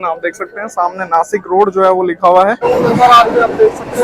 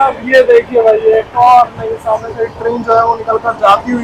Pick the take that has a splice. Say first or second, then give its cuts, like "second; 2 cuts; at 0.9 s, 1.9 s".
first; 1 cut; at 2.6 s